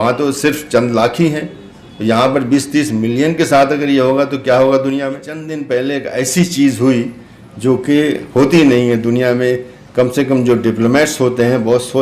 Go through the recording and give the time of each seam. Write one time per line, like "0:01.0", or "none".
0:05.5